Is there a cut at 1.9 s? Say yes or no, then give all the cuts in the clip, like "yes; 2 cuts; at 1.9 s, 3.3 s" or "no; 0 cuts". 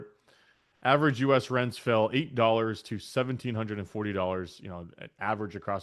no; 0 cuts